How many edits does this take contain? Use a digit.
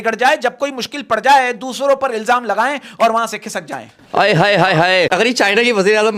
1